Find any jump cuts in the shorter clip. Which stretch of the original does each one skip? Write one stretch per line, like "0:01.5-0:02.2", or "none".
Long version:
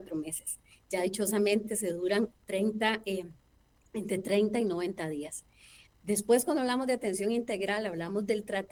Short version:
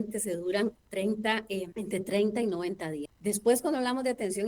0:03.3-0:03.9
0:05.3-0:05.9